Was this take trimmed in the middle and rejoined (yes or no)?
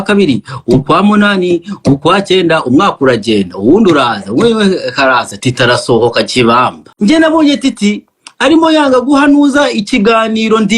yes